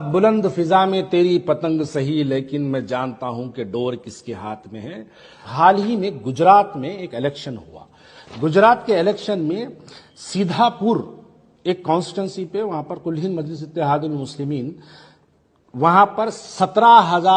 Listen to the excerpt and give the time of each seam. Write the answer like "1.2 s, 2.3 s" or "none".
5.4 s